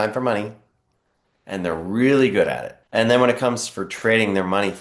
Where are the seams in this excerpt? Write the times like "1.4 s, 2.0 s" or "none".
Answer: 2.7 s